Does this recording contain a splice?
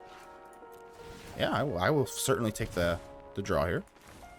no; 0 cuts

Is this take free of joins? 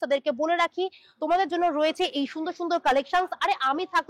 yes; 0 cuts

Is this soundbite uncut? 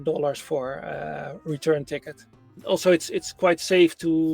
no; 1 cut; at 2.5 s

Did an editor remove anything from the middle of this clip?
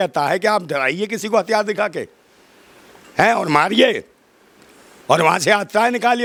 no; 0 cuts

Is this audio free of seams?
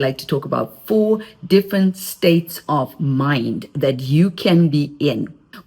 yes; 0 cuts

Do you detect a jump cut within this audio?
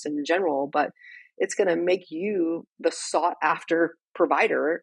no; 0 cuts

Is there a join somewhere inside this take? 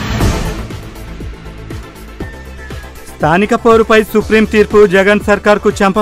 yes; 1 cut; at 3.1 s

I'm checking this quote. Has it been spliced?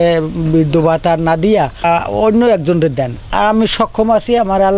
yes; 2 cuts; at 1.8 s, 3.2 s

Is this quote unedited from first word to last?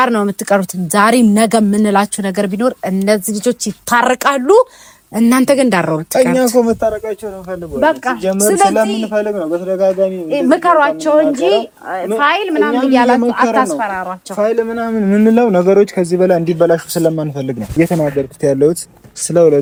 yes; 0 cuts

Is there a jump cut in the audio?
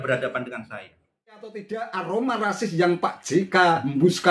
yes; 1 cut; at 1.6 s

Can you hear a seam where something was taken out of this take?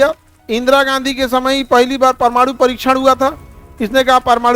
no; 0 cuts

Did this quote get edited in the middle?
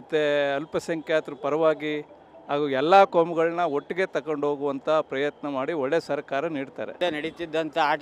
yes; 1 cut; at 7.0 s

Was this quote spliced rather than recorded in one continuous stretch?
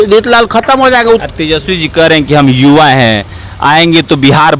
yes; 1 cut; at 1.2 s

